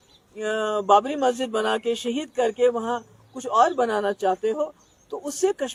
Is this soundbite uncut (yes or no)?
yes